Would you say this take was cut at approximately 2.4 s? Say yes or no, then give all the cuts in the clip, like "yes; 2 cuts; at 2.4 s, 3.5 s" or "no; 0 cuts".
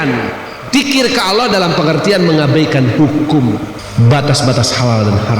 no; 1 cut; at 3.8 s